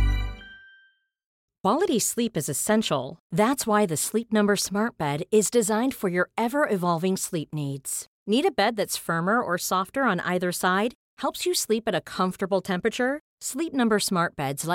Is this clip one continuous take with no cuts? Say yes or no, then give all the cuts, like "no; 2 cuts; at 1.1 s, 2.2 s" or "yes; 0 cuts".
no; 1 cut; at 1.4 s